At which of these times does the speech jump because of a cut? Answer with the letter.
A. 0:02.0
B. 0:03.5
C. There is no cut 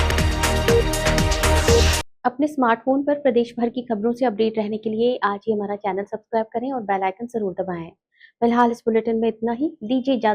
C